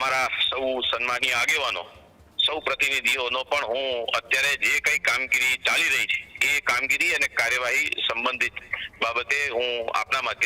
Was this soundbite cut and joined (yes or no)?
no